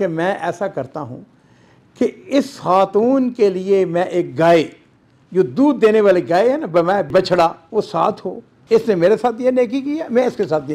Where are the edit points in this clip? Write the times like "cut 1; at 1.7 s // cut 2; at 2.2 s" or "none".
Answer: none